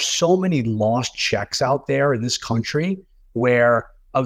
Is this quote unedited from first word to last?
yes; 0 cuts

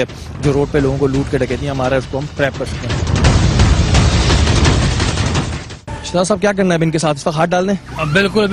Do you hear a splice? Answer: yes; 1 cut; at 5.5 s

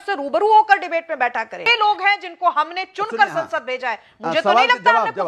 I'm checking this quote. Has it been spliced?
yes; 1 cut; at 1.7 s

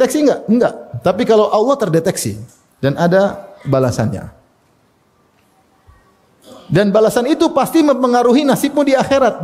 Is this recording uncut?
yes; 0 cuts

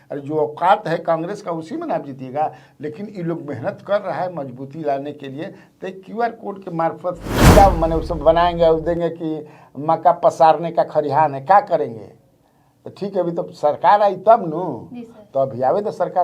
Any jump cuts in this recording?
yes; 1 cut; at 7.4 s

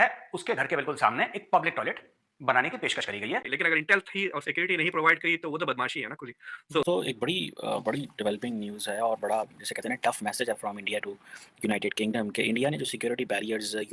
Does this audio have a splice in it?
yes; 2 cuts; at 3.5 s, 6.8 s

